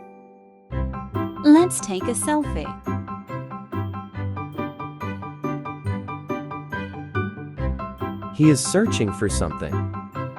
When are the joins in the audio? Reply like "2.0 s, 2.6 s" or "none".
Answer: 1.4 s